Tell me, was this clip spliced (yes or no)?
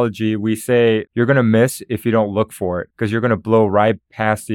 yes